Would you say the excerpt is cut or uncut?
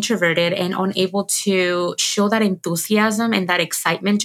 uncut